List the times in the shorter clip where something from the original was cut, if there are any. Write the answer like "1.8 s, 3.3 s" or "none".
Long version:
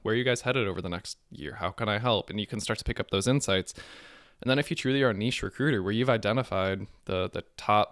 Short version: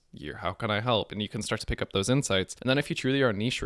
2.5 s